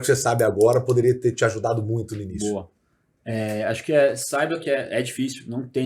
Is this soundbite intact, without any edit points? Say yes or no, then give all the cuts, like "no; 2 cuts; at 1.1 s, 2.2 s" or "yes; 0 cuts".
yes; 0 cuts